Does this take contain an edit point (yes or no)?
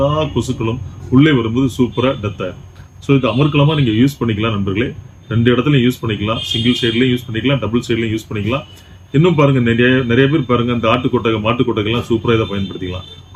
no